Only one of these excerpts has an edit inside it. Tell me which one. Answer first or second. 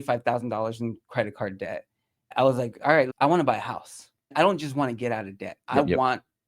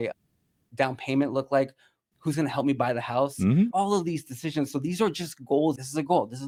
first